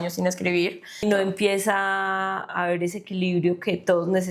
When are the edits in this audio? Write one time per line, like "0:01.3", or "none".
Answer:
0:01.0